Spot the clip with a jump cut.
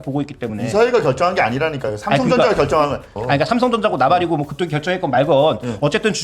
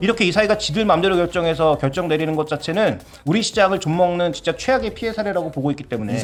first; 1 cut; at 3.1 s

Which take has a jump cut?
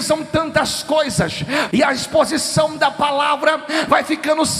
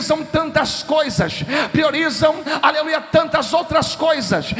first; 1 cut; at 1.7 s

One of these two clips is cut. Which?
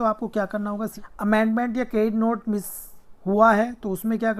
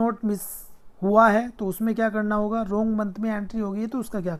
first; 1 cut; at 1.0 s

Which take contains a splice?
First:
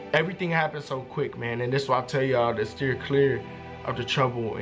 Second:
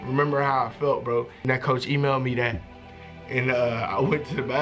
second; 1 cut; at 1.3 s

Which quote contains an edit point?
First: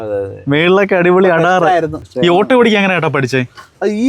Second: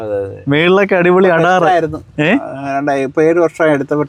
first; 1 cut; at 2.0 s

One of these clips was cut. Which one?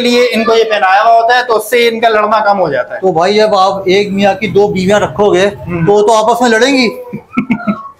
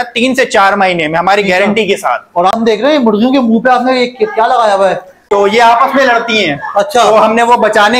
second; 2 cuts; at 2.5 s, 5.3 s

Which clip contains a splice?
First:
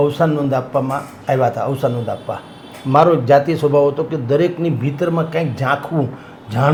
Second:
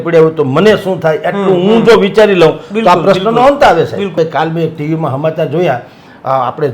second; 1 cut; at 4.1 s

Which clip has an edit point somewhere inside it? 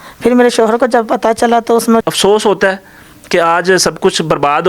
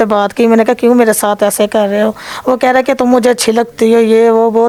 first; 1 cut; at 2.0 s

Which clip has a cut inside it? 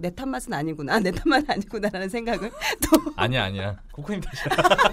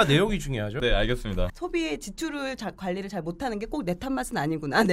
second; 1 cut; at 1.5 s

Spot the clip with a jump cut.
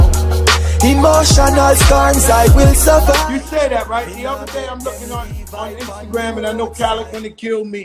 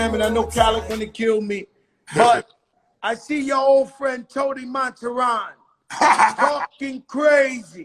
first; 1 cut; at 3.2 s

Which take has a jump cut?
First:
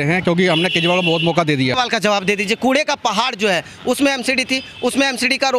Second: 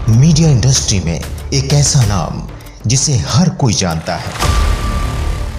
first; 1 cut; at 1.7 s

